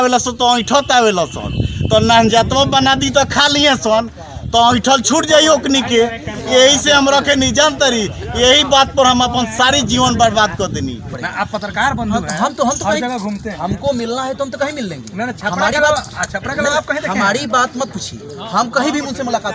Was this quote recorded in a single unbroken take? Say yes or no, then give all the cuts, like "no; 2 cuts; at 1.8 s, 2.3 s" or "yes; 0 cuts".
no; 1 cut; at 11.1 s